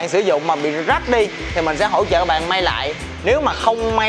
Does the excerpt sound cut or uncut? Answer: uncut